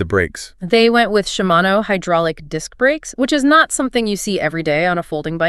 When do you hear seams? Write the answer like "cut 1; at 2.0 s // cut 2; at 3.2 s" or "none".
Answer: none